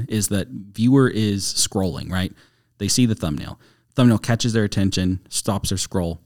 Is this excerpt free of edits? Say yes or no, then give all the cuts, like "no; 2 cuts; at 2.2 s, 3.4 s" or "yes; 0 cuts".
yes; 0 cuts